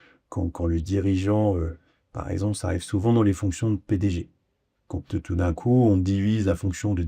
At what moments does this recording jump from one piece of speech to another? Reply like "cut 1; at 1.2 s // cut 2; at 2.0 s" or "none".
none